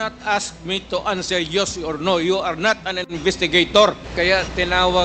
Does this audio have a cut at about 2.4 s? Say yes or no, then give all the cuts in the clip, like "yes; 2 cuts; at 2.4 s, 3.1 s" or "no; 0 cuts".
no; 1 cut; at 4.0 s